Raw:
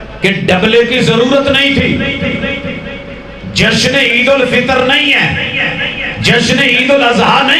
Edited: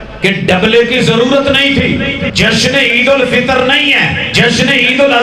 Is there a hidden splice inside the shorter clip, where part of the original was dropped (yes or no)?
yes